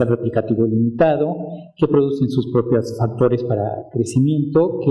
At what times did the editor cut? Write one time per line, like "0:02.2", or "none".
0:01.4